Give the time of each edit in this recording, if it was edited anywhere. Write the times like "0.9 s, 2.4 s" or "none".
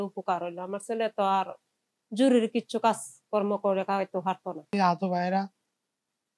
4.7 s

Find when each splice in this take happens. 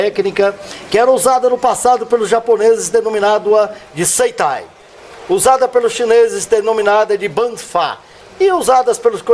4.7 s

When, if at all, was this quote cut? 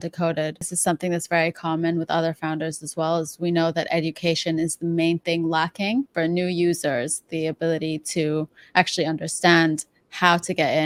none

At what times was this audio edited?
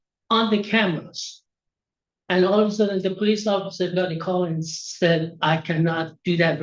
none

